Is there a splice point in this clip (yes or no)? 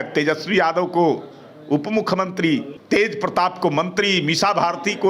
yes